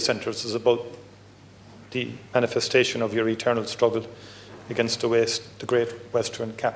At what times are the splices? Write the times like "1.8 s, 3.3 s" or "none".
none